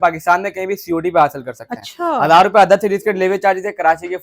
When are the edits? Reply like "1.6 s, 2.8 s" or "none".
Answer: none